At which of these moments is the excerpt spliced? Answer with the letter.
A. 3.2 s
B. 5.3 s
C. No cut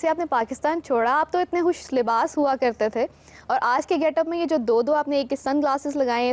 C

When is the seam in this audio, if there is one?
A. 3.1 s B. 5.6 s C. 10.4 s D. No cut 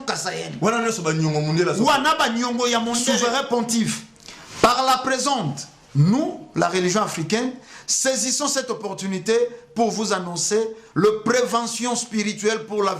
A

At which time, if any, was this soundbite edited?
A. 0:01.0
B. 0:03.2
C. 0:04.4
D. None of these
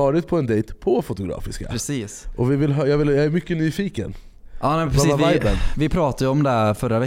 D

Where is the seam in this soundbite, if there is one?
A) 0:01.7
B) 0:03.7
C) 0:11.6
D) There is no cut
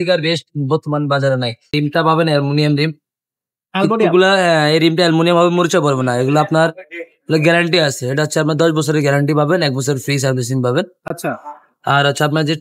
A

